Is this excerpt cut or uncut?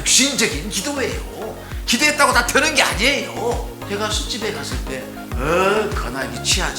cut